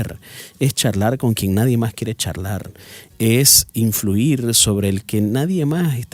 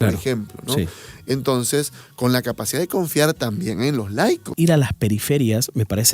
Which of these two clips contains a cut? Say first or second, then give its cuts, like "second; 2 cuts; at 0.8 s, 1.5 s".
second; 1 cut; at 4.5 s